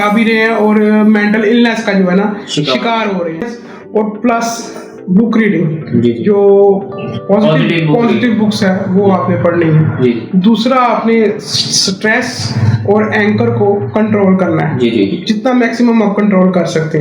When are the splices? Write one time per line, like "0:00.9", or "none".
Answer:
0:03.5